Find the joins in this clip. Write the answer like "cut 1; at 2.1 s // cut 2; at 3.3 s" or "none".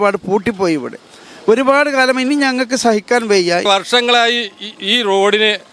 cut 1; at 3.7 s